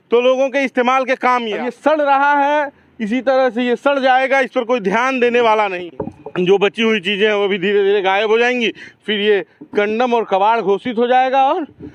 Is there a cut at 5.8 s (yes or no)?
yes